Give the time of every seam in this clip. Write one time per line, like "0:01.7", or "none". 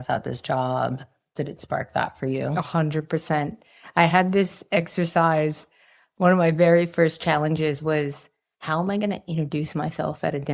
0:01.4